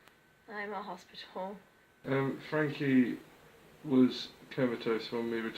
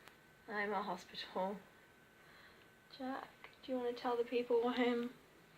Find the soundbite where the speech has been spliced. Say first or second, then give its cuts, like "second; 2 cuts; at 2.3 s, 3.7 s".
first; 1 cut; at 2.0 s